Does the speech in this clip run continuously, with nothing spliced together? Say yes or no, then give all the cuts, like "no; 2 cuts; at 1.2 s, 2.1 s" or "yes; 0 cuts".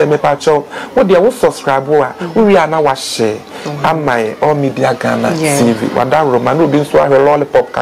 yes; 0 cuts